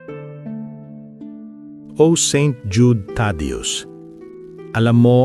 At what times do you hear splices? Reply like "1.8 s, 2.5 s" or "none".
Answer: 1.0 s